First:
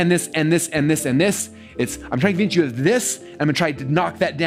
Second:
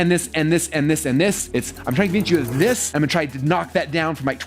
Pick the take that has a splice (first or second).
second